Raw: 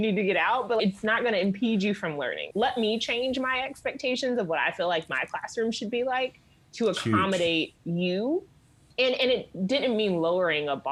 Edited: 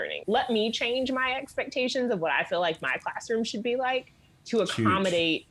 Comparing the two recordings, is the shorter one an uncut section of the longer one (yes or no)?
yes